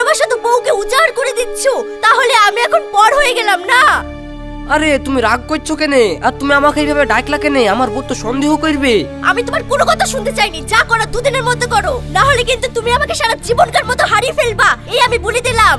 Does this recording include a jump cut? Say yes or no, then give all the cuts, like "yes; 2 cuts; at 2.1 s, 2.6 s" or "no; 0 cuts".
no; 0 cuts